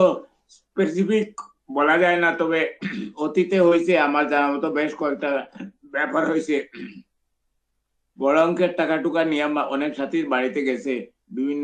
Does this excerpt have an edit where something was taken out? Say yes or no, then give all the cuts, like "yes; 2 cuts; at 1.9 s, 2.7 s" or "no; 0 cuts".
no; 0 cuts